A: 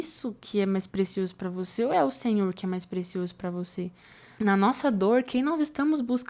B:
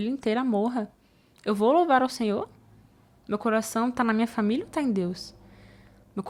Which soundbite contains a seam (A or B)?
A